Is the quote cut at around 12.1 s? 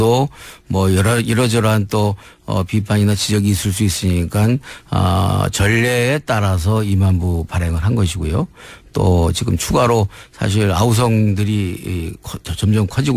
no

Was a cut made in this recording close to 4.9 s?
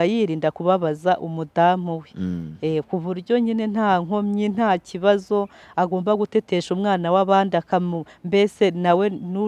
no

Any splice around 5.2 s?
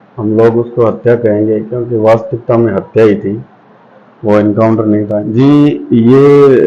yes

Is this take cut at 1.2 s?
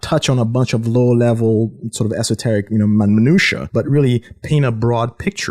no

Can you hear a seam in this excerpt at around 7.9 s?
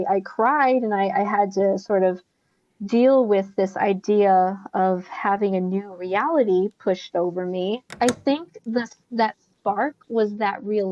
yes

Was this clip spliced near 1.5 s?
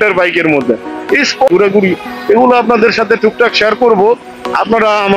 yes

